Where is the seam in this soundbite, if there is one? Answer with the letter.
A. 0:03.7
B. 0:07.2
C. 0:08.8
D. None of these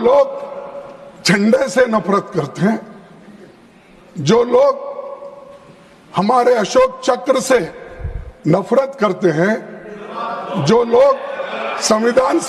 D